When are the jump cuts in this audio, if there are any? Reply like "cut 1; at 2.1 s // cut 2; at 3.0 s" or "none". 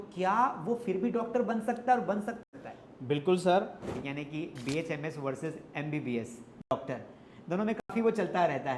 cut 1; at 2.4 s // cut 2; at 3.9 s